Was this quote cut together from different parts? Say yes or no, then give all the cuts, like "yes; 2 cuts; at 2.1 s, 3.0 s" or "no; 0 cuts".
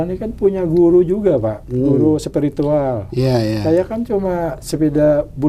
no; 0 cuts